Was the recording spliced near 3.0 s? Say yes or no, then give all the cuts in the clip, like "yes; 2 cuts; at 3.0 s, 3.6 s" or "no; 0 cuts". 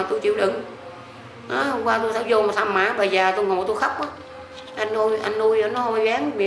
no; 0 cuts